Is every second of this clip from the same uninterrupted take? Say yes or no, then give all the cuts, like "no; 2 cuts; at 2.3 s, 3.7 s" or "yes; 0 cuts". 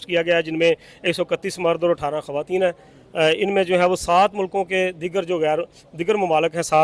yes; 0 cuts